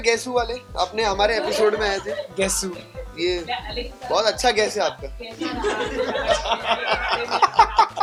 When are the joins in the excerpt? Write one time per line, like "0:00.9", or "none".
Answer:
none